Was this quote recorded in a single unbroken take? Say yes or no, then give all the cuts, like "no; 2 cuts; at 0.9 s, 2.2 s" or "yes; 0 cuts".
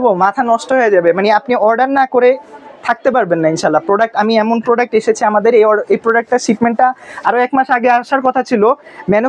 yes; 0 cuts